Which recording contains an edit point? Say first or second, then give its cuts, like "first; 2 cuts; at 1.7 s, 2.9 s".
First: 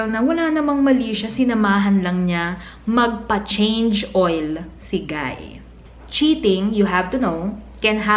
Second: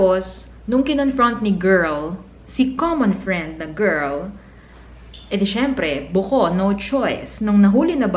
first; 1 cut; at 5.7 s